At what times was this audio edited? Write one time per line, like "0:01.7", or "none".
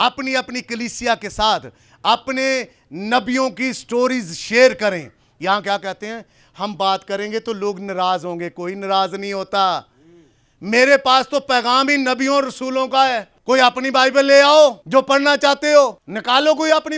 0:13.3
0:14.8
0:16.1